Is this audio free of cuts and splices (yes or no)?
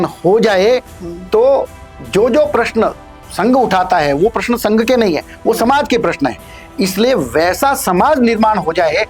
yes